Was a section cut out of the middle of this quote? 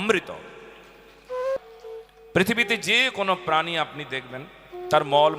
yes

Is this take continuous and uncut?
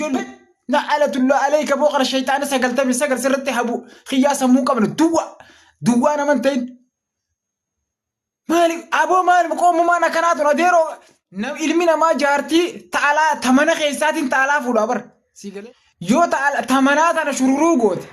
yes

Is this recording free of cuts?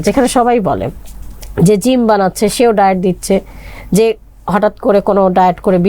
yes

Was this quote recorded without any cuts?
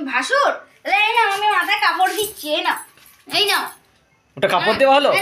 yes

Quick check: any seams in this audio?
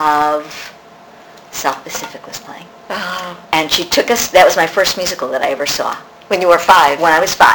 no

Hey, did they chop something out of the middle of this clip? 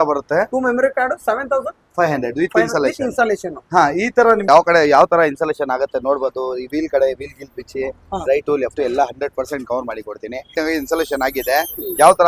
yes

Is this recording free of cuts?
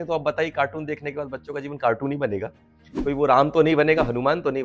yes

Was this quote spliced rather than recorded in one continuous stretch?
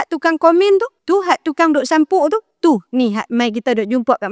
yes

